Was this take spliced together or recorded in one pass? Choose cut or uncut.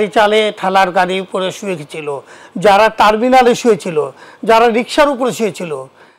uncut